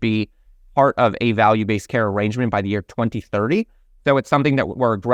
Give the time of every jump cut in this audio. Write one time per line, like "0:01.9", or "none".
none